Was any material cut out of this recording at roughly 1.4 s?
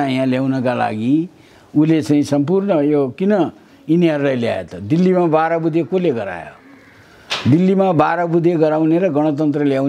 no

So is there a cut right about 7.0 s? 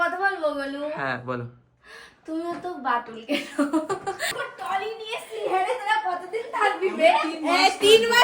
no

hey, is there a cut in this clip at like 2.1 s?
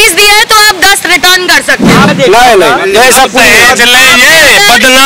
yes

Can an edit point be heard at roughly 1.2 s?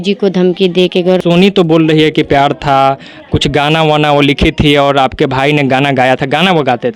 yes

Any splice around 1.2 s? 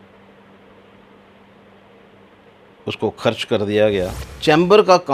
no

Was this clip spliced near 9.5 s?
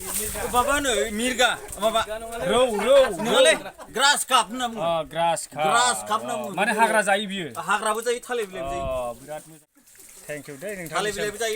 yes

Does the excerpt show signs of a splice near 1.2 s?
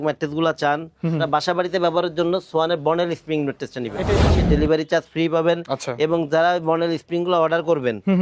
yes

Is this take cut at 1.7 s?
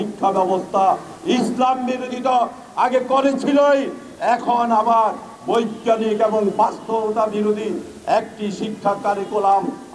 no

